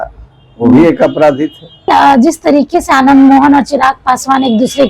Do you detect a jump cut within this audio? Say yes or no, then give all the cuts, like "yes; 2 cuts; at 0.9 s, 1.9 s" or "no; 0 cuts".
yes; 1 cut; at 1.9 s